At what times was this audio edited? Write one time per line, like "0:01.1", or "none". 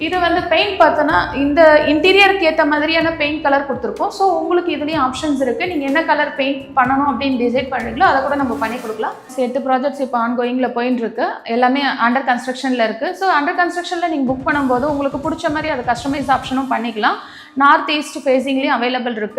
0:09.3